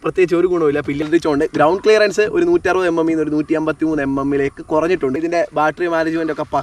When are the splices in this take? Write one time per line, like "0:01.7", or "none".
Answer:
0:01.0
0:05.2